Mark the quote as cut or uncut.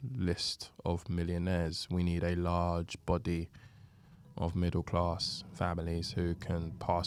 uncut